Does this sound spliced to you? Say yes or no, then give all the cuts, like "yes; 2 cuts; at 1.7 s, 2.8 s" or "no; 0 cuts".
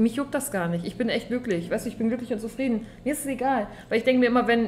no; 0 cuts